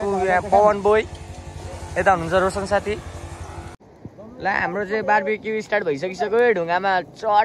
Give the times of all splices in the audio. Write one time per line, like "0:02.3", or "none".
0:03.8